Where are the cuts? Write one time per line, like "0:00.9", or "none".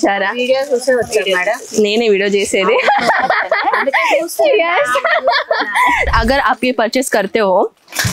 0:06.1